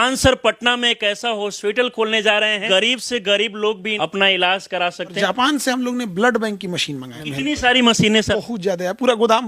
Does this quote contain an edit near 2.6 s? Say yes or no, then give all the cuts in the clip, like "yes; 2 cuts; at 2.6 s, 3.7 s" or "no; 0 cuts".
yes; 5 cuts; at 2.6 s, 3.9 s, 5.2 s, 7.2 s, 8.3 s